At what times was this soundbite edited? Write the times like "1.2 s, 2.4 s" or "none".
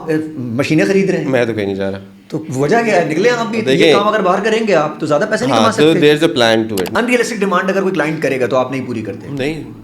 6.9 s

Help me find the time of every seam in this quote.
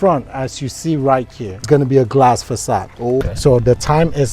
1.6 s, 3.2 s

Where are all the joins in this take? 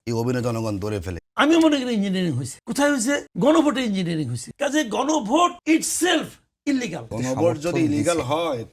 1.2 s, 2.5 s, 3.3 s, 4.4 s, 5.6 s, 7.0 s

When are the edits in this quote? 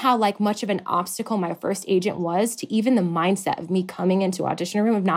none

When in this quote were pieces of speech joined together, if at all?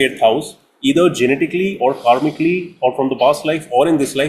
none

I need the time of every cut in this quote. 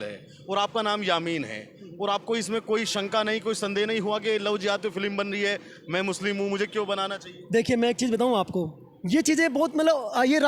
none

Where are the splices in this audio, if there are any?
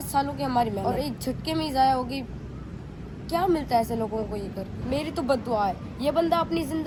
none

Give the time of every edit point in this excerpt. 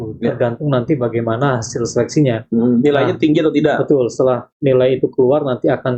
none

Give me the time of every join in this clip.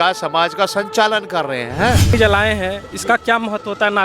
2.1 s

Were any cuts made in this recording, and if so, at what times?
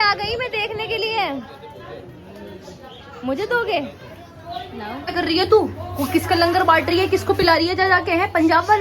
5.0 s

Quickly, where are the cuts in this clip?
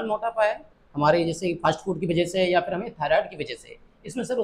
none

